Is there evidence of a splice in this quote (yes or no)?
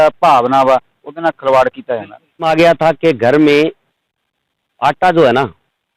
yes